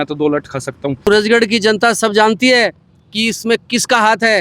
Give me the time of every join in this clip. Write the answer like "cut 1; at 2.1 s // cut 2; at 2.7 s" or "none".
cut 1; at 1.1 s